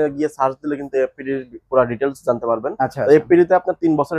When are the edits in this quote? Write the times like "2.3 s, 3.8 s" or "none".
none